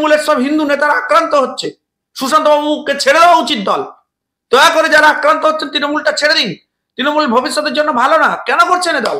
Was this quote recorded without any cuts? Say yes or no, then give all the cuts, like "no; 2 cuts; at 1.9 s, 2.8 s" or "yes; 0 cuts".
yes; 0 cuts